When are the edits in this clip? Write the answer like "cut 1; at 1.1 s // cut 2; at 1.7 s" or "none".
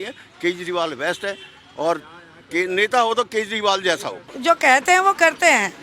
cut 1; at 4.3 s